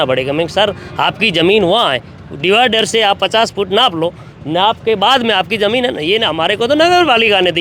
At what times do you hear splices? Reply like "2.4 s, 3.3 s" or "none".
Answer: none

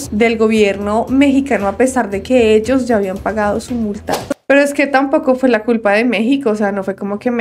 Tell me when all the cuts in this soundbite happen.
4.4 s

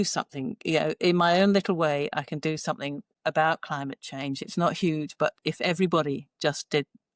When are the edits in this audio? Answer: none

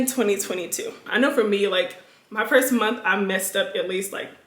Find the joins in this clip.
1.0 s

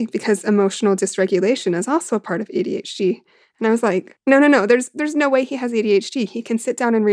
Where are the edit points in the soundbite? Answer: none

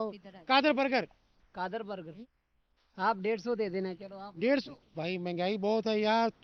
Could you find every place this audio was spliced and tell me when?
2.1 s

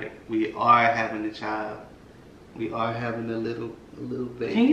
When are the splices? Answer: none

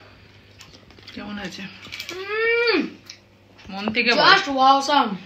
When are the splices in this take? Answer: none

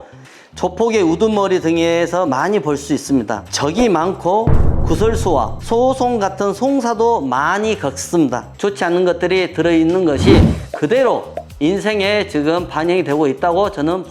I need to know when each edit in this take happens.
3.5 s, 8.5 s

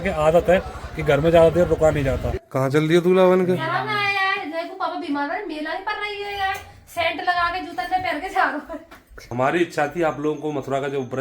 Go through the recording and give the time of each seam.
2.3 s, 9.3 s

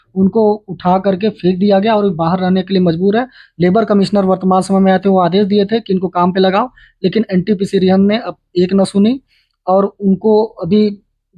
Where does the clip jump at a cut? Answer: none

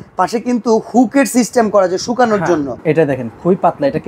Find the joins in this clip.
2.7 s

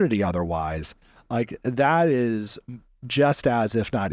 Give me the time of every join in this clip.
none

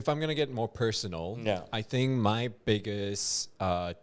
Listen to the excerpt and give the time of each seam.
none

